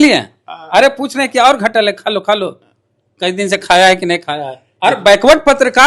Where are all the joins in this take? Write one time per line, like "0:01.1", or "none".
0:04.6